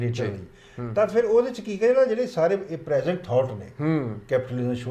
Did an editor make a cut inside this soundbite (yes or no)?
no